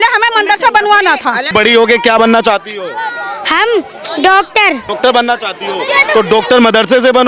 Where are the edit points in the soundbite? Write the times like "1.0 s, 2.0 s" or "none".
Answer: 1.5 s, 4.9 s